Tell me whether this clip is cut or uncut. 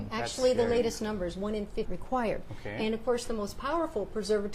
uncut